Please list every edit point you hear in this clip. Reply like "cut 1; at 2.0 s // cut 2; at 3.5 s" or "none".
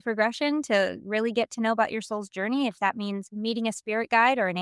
none